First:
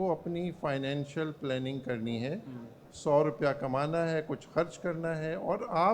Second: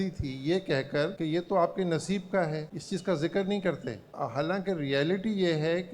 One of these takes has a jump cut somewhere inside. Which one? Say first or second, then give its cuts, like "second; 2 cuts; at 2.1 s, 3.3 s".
second; 3 cuts; at 1.1 s, 2.7 s, 4.1 s